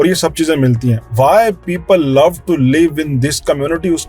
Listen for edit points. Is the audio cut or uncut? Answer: uncut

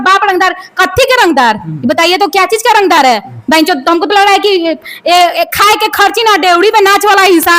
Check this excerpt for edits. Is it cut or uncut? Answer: uncut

